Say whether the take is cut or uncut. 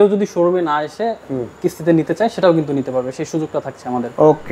uncut